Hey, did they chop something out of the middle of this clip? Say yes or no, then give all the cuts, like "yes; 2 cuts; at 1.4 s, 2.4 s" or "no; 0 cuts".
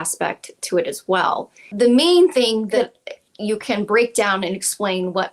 yes; 2 cuts; at 1.7 s, 2.8 s